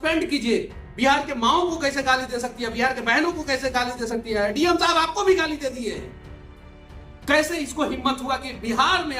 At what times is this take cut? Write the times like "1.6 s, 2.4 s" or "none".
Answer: none